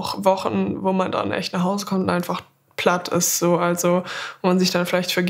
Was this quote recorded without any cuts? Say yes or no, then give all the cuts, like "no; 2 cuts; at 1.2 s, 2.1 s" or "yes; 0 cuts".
yes; 0 cuts